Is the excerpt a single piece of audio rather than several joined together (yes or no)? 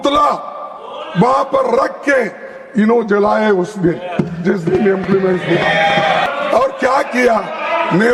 no